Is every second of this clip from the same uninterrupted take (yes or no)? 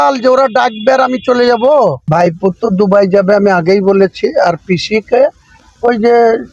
no